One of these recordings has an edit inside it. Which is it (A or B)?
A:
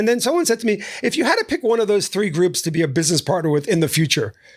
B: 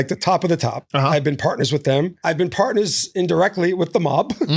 B